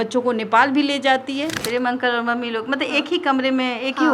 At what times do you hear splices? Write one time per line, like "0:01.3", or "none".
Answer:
0:01.6